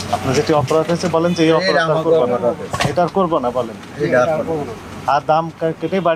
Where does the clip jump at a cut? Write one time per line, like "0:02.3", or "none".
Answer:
none